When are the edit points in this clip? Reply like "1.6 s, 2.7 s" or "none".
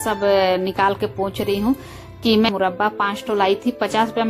2.5 s